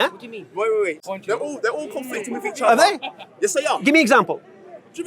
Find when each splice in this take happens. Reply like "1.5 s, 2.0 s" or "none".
1.0 s